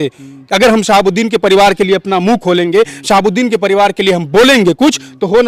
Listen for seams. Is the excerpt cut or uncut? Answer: uncut